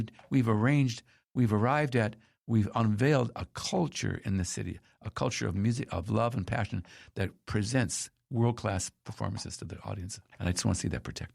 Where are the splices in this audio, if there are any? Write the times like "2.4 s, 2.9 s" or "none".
none